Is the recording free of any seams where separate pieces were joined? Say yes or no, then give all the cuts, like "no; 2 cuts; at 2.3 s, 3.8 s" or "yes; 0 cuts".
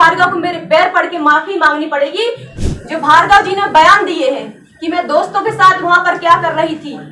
no; 1 cut; at 2.5 s